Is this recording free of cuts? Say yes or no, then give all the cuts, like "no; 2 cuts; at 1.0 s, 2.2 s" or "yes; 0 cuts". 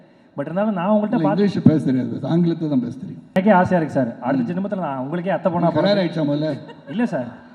no; 1 cut; at 3.3 s